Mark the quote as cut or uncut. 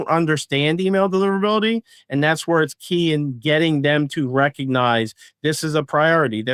uncut